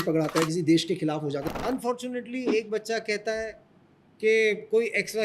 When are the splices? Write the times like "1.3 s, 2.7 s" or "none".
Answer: 1.4 s